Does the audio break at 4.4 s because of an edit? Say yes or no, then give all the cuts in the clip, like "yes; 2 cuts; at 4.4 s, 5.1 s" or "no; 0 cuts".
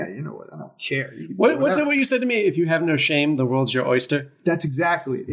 no; 0 cuts